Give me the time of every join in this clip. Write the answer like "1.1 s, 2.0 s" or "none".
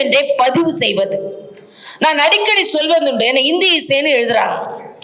none